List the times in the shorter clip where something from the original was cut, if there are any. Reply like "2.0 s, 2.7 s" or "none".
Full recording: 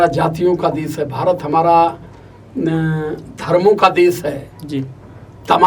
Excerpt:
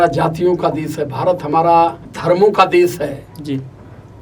2.1 s

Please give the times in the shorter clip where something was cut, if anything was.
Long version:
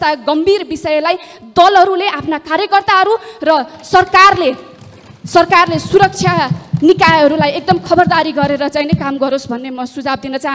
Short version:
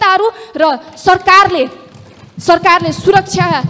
none

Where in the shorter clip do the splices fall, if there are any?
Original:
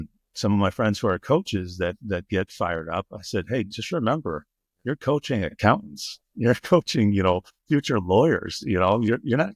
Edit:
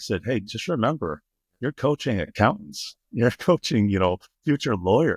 none

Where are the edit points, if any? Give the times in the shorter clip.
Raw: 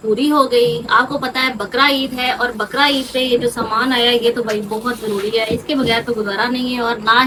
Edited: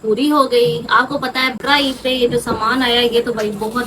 1.6 s

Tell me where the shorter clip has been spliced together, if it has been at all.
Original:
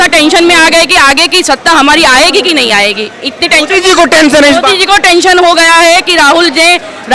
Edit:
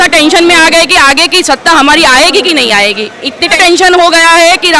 3.6 s

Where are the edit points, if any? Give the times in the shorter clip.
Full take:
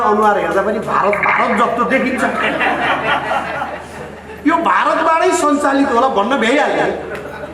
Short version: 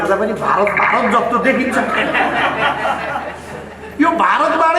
none

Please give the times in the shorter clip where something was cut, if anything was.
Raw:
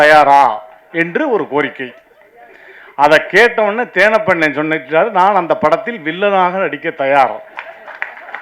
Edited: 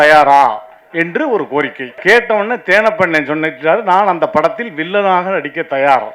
2.0 s

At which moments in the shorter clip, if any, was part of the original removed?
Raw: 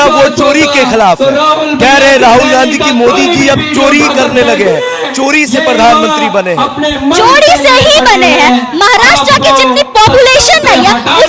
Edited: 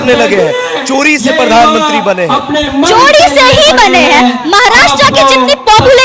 none

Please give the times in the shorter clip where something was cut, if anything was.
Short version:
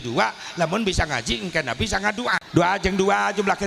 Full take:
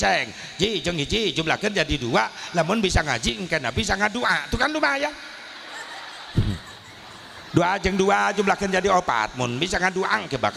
2.4 s

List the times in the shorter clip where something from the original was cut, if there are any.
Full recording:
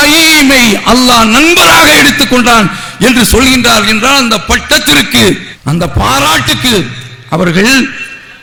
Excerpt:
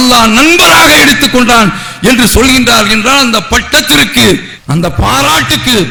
none

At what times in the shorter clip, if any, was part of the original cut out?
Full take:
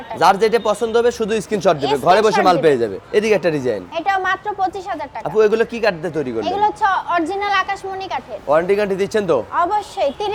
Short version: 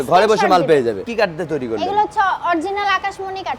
1.1 s

